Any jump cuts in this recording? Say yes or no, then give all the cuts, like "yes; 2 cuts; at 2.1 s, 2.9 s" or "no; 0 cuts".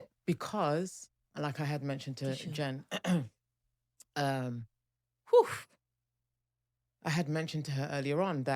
no; 0 cuts